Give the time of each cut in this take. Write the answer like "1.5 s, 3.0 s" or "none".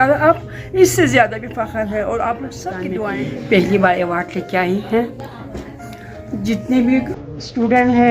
2.9 s